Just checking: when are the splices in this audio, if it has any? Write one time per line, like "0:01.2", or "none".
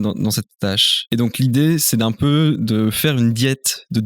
0:00.9

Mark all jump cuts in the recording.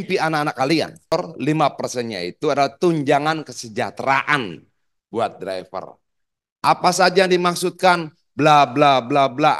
0:01.1

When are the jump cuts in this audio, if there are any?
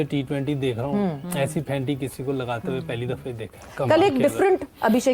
none

